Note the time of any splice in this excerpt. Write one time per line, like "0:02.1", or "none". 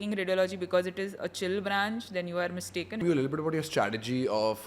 0:03.0